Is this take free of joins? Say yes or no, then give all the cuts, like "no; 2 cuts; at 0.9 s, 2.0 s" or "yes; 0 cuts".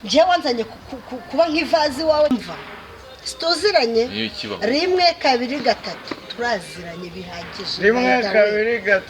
no; 1 cut; at 2.3 s